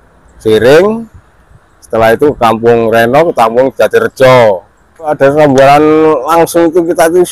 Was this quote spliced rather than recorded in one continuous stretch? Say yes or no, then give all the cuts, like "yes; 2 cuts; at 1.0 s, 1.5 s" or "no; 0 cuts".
yes; 1 cut; at 5.1 s